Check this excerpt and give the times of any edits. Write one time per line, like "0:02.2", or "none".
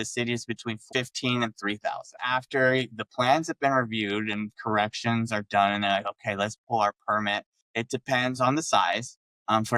0:00.8
0:02.2